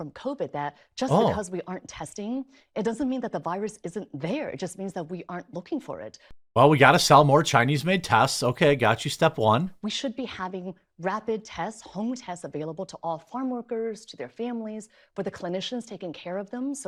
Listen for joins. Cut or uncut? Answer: uncut